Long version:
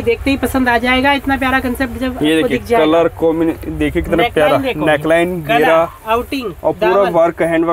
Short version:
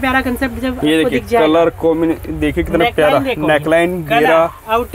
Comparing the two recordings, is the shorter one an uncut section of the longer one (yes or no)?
yes